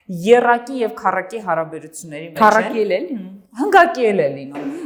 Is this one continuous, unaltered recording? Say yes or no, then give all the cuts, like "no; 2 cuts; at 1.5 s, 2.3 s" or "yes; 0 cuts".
yes; 0 cuts